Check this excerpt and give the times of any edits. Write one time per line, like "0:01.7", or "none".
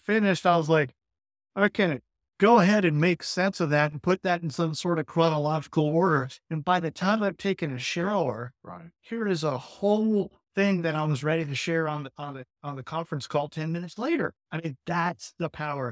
0:14.4